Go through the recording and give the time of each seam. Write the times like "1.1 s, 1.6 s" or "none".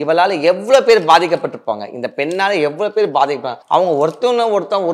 3.5 s